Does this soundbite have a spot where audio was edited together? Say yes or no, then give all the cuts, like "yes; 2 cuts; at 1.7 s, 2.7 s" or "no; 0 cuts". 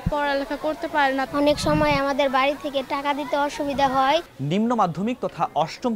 yes; 1 cut; at 4.3 s